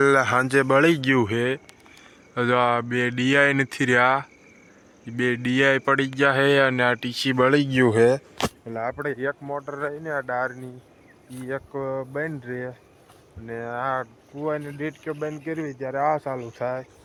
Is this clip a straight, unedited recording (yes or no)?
yes